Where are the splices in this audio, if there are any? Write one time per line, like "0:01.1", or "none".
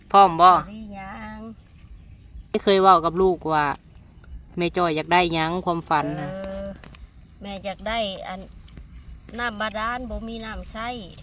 0:02.6